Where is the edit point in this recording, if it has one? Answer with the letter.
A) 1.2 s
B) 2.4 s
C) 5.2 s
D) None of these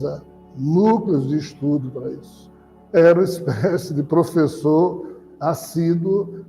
B